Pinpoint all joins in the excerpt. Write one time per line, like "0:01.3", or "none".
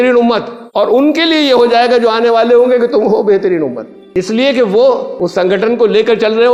none